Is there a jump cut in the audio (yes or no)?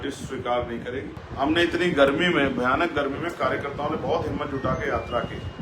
yes